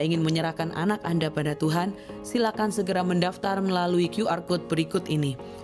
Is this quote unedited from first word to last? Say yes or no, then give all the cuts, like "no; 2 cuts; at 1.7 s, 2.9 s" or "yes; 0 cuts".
yes; 0 cuts